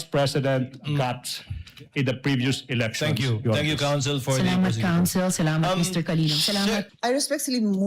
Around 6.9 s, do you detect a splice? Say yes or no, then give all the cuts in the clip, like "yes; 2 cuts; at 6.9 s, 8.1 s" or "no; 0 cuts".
yes; 1 cut; at 6.9 s